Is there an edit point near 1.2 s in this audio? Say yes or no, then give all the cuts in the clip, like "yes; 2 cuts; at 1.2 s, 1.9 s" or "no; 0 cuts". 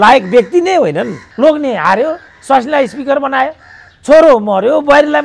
yes; 1 cut; at 1.2 s